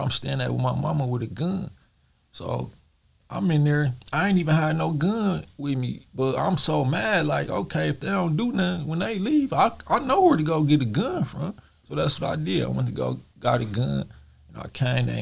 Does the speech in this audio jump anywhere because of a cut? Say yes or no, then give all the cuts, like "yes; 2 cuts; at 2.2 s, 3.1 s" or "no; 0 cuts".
no; 0 cuts